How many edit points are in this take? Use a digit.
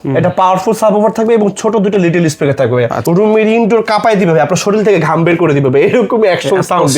1